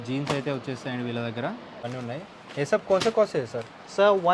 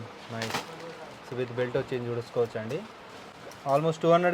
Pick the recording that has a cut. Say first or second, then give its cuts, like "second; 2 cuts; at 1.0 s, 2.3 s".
first; 1 cut; at 1.9 s